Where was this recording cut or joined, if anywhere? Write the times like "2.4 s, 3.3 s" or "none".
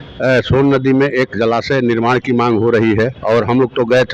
3.2 s